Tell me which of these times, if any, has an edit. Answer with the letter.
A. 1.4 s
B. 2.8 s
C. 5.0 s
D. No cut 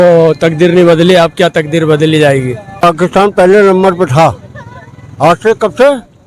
B